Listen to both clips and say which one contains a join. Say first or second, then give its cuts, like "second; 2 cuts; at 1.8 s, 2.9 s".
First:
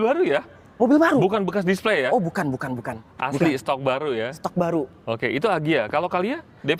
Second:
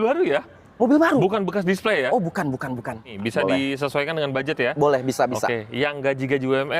second; 1 cut; at 3.1 s